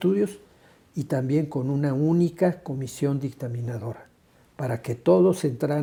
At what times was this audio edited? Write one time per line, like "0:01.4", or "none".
none

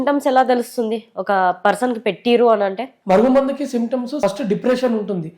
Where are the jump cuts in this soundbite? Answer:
0:04.2

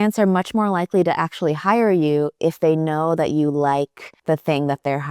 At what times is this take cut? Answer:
0:04.1

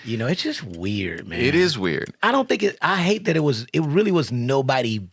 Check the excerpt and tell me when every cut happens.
0:02.1

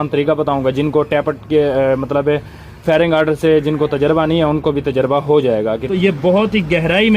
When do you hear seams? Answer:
0:05.8

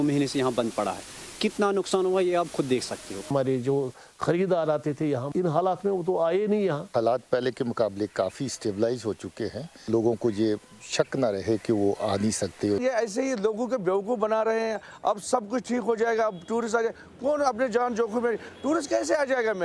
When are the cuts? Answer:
0:03.3
0:06.8
0:09.9
0:12.8

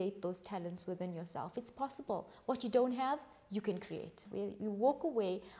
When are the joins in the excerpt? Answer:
0:04.2

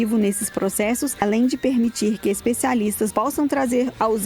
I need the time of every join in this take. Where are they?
0:01.2
0:03.1

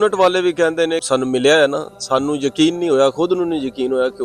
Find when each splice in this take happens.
0:01.0

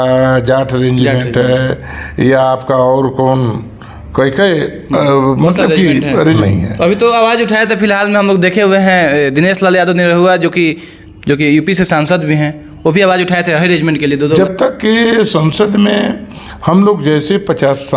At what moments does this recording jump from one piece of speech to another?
0:06.4
0:14.4

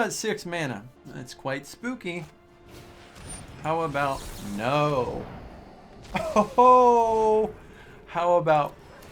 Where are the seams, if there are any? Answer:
0:01.0

